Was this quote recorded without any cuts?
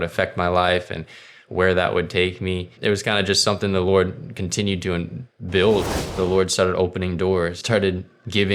no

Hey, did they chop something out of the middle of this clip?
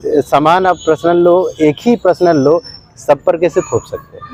no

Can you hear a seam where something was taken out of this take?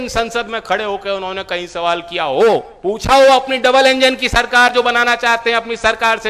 yes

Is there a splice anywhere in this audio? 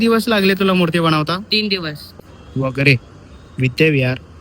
yes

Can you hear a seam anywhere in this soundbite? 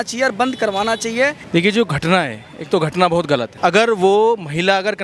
no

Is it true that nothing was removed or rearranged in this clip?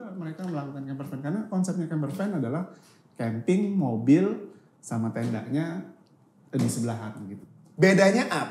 no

